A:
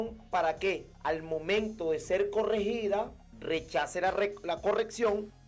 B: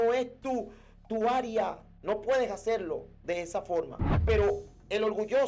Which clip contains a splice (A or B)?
B